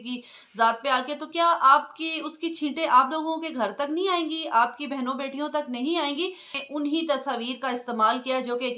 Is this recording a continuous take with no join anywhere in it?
no; 1 cut; at 6.5 s

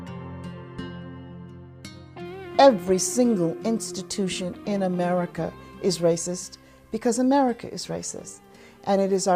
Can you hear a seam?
yes; 1 cut; at 7.4 s

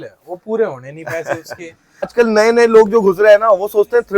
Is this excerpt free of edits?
no; 1 cut; at 2.1 s

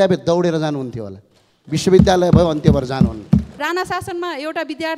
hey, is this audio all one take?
no; 1 cut; at 3.6 s

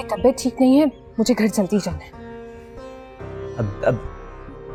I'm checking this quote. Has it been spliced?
no; 0 cuts

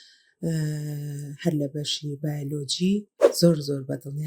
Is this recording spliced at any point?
yes; 1 cut; at 3.2 s

